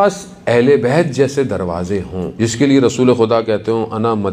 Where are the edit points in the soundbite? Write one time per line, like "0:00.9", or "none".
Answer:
0:02.3